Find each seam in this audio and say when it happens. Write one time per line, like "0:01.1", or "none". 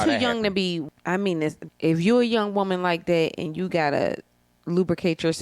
0:00.9
0:01.7